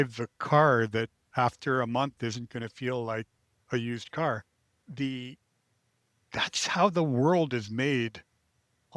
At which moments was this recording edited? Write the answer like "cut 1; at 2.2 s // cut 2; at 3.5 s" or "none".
none